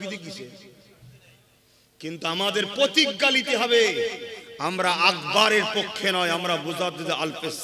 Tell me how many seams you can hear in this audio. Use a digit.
0